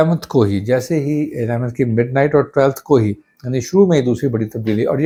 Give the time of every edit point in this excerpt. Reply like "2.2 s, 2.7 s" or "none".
none